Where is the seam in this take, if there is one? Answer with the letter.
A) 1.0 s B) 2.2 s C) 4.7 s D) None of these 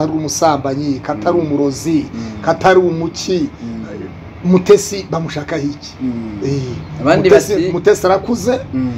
D